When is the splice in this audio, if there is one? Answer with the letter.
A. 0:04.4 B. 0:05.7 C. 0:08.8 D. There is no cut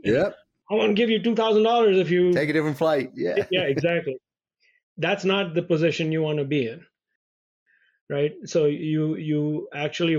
D